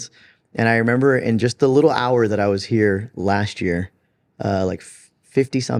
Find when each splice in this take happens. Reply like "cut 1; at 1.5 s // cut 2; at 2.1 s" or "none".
none